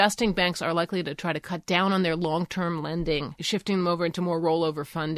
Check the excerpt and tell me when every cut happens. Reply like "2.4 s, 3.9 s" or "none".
3.3 s

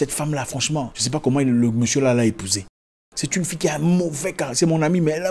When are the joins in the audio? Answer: 1.0 s

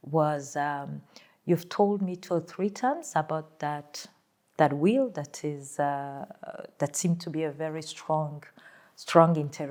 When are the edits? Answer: none

